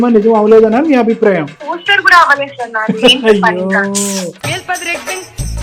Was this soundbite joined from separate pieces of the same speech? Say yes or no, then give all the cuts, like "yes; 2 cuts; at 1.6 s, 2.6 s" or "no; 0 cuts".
yes; 2 cuts; at 1.6 s, 4.4 s